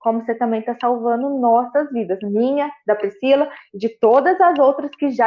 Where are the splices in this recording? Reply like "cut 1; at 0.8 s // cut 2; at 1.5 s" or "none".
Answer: none